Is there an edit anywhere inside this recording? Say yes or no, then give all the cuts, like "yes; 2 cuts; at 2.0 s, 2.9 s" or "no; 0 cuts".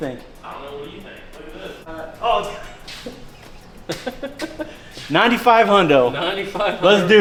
no; 0 cuts